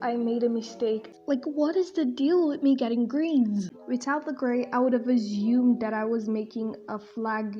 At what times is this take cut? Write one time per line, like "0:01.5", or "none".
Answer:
0:01.1
0:03.8